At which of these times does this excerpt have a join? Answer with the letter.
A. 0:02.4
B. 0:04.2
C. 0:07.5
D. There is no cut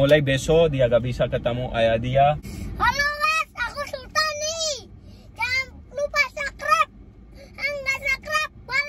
A